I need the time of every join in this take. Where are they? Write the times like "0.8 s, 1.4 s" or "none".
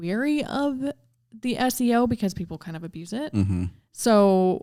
none